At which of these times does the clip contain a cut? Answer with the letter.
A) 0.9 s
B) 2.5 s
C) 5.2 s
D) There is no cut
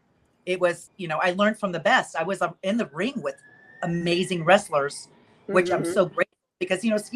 A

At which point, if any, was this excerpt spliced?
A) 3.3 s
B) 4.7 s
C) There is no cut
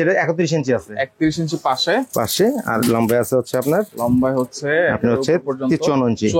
C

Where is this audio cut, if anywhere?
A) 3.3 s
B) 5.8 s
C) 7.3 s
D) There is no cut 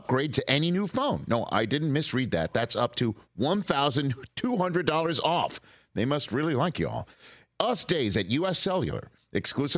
D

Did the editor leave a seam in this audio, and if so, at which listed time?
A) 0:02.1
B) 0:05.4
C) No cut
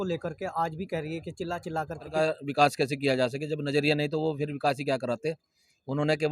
A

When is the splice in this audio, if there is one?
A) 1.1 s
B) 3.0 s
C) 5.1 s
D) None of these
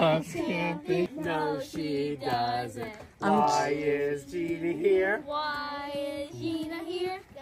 A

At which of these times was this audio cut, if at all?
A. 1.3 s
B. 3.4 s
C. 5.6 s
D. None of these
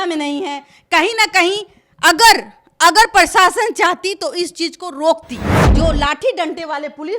C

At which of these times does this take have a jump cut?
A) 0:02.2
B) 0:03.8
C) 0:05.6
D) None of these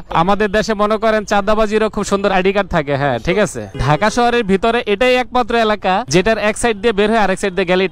B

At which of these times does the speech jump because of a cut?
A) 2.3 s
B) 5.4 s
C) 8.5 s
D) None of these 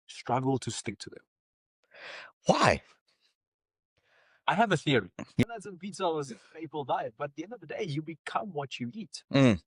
B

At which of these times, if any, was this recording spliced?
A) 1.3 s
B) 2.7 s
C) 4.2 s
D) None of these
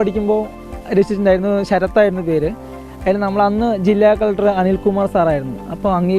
D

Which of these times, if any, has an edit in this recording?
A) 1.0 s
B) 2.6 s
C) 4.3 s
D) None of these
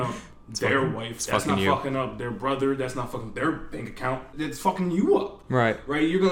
C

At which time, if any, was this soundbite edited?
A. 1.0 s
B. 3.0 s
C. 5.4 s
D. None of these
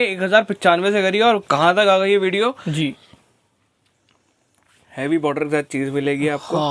B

